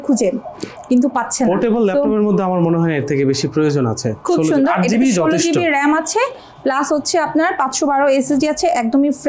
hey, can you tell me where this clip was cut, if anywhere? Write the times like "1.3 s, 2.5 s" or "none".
none